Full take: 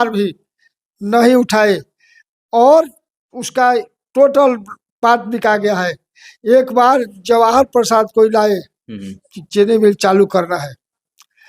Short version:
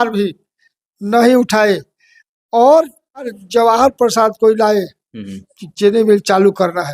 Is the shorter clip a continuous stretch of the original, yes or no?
no